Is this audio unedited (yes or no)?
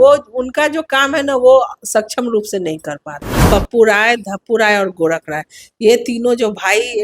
no